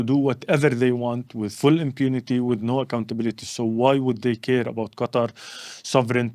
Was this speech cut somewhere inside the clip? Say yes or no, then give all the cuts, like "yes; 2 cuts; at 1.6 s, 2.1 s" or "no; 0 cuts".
no; 0 cuts